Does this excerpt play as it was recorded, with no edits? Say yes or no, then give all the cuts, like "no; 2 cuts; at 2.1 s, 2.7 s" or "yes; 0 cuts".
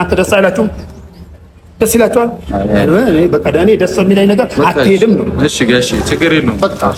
yes; 0 cuts